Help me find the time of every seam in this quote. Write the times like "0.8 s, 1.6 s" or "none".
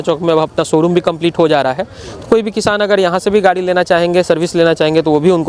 none